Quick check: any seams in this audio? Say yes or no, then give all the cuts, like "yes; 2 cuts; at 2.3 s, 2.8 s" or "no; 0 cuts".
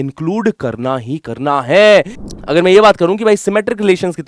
yes; 1 cut; at 2.2 s